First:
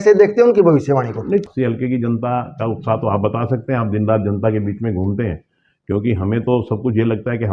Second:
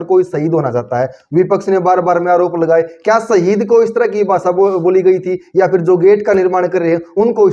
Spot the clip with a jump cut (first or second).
first